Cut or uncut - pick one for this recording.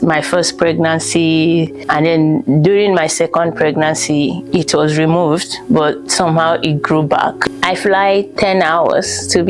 cut